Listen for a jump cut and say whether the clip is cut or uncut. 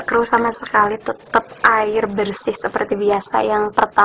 uncut